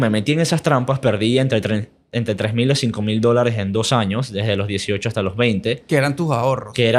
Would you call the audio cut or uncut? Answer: uncut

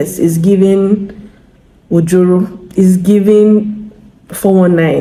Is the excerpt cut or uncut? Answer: uncut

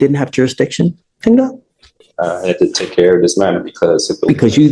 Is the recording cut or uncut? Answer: uncut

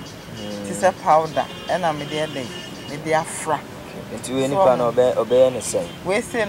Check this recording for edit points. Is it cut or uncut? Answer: uncut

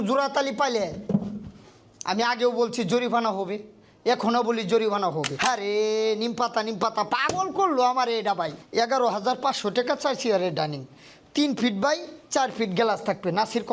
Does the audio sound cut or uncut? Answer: cut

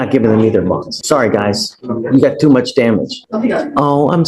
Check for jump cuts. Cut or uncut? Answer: cut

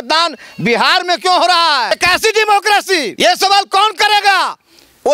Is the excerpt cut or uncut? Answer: cut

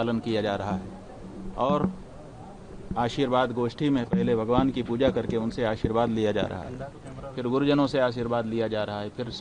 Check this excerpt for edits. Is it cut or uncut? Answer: uncut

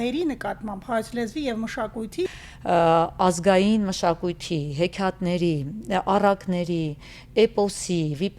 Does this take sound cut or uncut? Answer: cut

